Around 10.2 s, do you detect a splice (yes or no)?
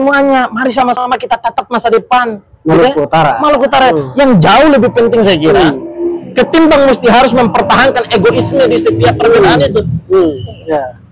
no